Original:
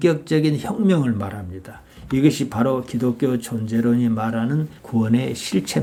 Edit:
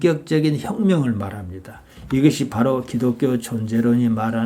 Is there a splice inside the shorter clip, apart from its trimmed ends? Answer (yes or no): no